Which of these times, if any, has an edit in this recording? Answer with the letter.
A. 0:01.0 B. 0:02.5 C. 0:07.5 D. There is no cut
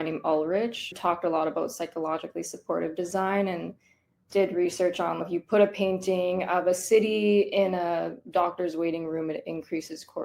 A